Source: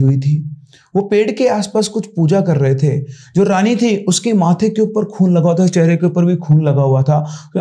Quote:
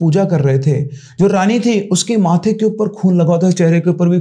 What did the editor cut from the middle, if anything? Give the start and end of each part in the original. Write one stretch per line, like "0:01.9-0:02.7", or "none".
none